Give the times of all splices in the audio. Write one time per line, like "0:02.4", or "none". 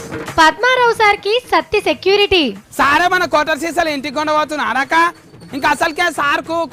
none

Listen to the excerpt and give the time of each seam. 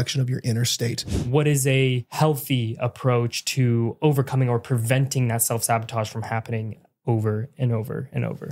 0:01.1
0:02.0

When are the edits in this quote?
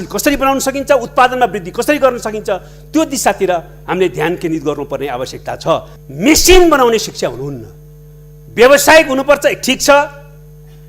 0:06.0

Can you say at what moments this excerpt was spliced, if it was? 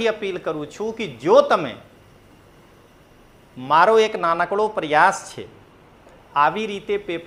none

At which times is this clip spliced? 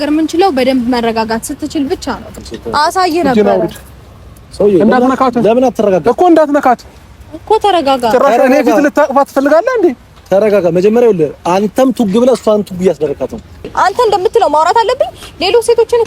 0:02.3
0:13.7

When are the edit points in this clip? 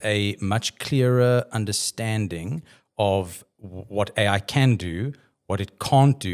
none

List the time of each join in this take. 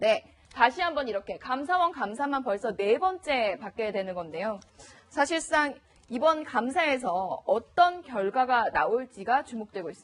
none

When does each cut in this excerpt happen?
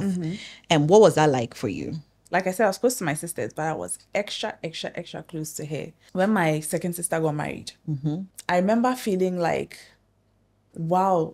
0:02.1
0:06.0
0:08.3

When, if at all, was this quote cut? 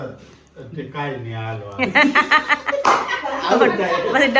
none

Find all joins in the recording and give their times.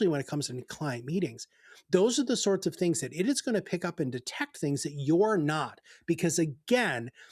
none

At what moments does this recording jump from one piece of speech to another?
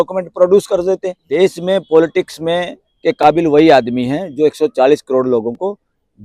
0:01.2

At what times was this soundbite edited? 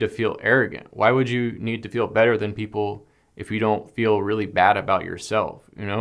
none

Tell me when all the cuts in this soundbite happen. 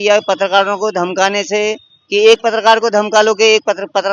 none

